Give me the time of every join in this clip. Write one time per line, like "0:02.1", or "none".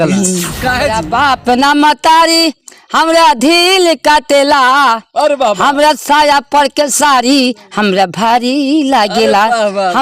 0:01.0

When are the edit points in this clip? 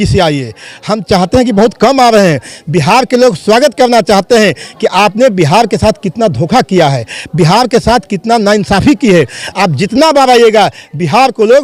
none

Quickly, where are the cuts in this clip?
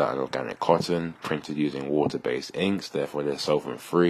none

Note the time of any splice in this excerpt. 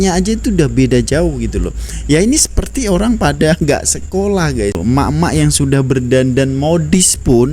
0:04.8

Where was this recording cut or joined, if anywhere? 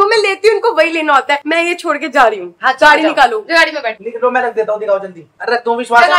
none

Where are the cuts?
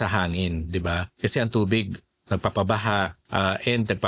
0:01.1
0:03.2

